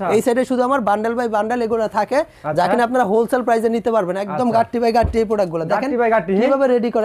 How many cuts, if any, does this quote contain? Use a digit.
0